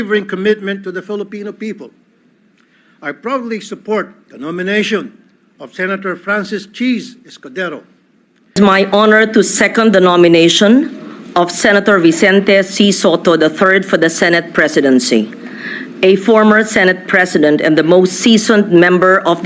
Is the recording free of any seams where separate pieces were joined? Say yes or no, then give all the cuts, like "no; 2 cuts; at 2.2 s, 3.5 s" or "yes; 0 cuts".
no; 1 cut; at 8.5 s